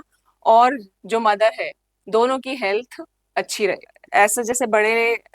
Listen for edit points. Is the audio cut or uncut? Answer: cut